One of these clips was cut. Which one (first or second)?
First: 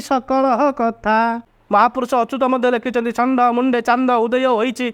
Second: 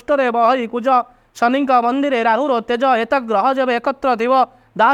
first